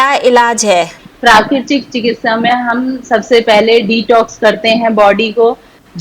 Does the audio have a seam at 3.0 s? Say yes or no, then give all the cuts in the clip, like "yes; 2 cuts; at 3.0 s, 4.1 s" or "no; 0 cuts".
no; 1 cut; at 1.0 s